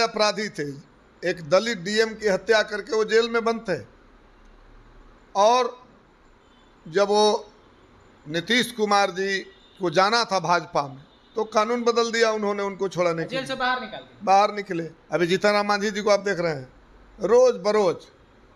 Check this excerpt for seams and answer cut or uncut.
cut